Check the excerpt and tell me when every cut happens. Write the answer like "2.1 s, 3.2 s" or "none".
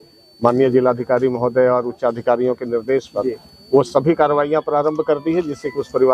none